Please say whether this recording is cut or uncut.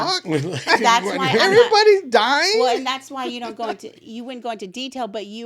uncut